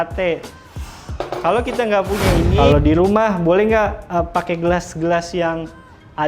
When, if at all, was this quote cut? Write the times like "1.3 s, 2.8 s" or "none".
2.5 s